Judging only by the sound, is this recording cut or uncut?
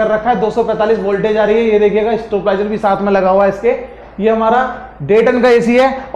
uncut